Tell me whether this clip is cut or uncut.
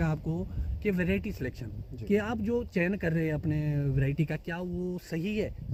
uncut